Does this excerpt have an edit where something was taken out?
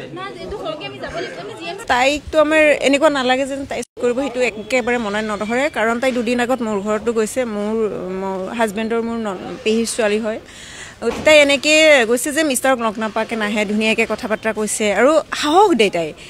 yes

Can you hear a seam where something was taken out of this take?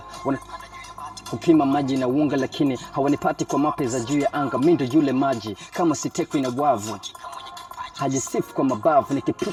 no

